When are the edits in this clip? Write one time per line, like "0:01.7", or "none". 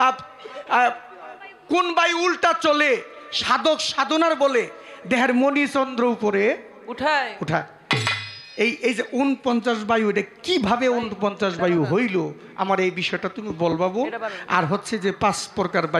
none

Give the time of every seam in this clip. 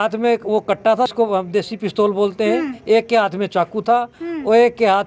0:01.1

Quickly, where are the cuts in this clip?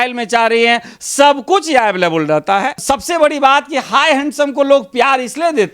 0:02.8

